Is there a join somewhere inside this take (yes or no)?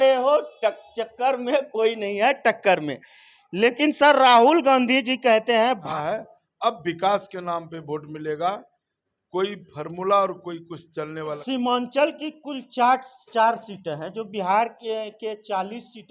yes